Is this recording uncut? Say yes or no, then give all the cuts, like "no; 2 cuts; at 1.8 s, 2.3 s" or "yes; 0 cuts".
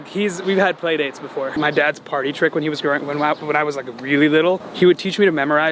no; 1 cut; at 1.5 s